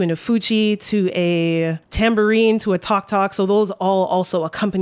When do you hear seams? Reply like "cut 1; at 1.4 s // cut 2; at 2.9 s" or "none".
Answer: cut 1; at 1.8 s